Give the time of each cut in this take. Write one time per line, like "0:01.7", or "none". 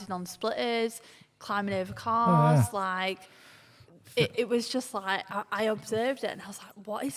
none